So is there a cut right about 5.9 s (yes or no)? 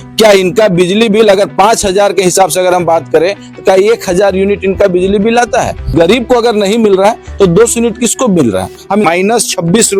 yes